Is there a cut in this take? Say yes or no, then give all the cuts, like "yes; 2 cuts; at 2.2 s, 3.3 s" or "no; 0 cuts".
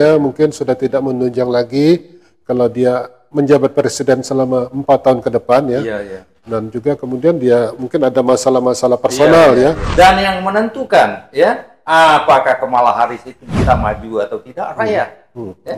yes; 1 cut; at 9.8 s